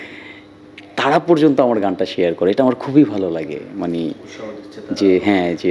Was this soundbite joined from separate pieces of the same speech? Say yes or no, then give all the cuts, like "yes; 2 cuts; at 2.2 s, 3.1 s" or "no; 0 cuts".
no; 0 cuts